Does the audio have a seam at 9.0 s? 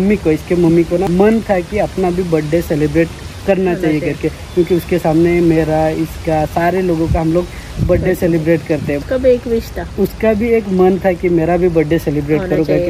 yes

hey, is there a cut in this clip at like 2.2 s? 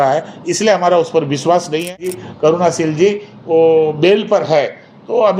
yes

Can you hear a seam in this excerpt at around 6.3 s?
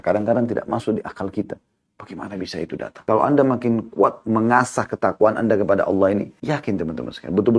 yes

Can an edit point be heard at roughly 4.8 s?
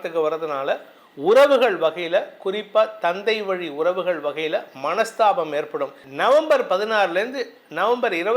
no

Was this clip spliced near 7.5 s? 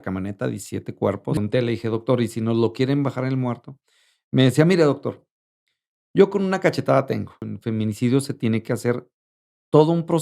yes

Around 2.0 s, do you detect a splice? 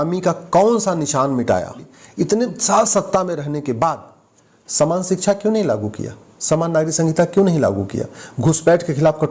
yes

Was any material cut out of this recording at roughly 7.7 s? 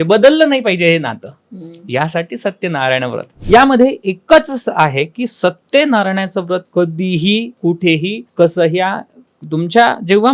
yes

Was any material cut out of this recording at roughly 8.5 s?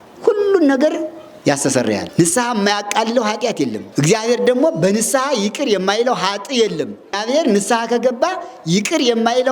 no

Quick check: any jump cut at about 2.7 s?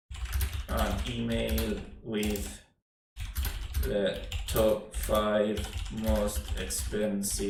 no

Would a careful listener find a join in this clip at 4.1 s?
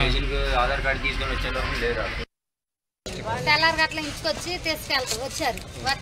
no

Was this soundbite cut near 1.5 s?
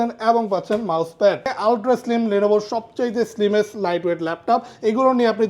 yes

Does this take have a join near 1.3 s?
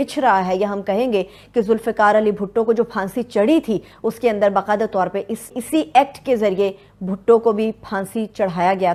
no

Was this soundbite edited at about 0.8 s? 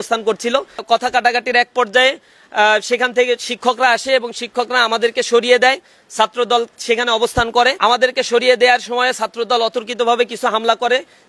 yes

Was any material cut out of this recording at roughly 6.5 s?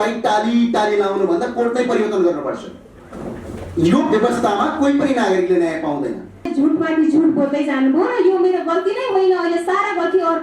yes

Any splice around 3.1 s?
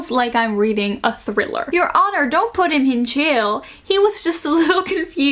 no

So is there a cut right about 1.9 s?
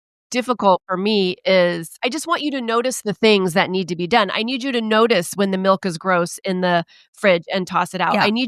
yes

